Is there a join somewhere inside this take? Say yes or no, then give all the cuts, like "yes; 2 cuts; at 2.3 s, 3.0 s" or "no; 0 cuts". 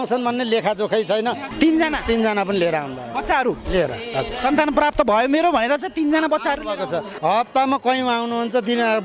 yes; 2 cuts; at 1.5 s, 7.1 s